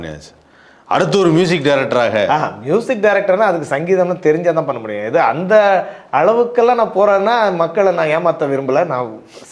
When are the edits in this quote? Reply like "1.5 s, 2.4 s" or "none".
none